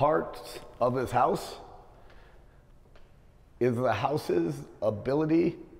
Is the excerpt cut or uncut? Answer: uncut